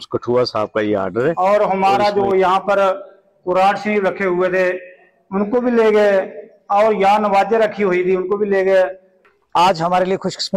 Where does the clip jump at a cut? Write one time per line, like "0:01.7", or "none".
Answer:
0:01.4
0:09.2

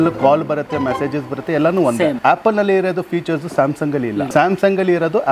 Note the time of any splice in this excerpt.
0:02.2
0:04.3

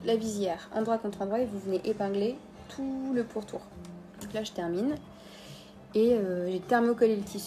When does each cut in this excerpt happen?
none

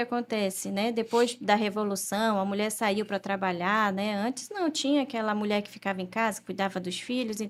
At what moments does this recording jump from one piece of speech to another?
none

